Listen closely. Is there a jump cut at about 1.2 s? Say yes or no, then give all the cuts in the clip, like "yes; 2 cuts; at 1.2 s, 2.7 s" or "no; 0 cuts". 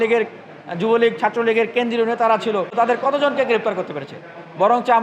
no; 1 cut; at 2.7 s